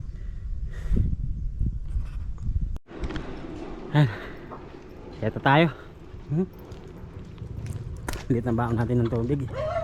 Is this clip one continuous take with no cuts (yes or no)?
yes